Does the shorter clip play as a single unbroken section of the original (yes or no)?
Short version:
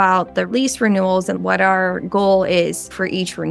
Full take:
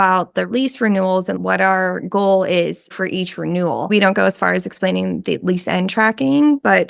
yes